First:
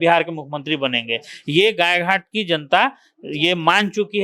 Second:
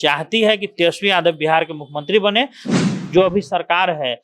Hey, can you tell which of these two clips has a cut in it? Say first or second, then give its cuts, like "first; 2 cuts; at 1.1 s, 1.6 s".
second; 1 cut; at 2.7 s